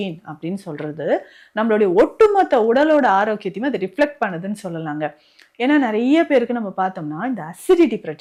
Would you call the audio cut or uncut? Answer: uncut